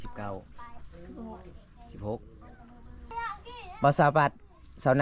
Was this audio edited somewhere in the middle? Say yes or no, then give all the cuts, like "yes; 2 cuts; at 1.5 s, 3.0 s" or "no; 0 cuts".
yes; 1 cut; at 3.1 s